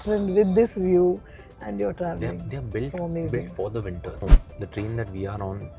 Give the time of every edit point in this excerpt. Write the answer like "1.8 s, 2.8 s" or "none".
4.2 s